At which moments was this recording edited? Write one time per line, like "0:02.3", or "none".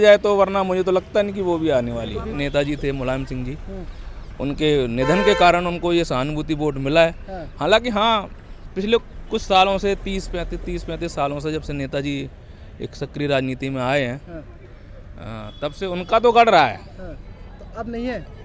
0:02.3